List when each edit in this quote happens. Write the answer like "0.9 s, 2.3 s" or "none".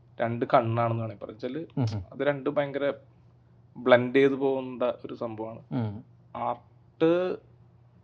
none